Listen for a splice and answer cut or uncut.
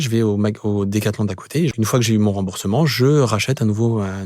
cut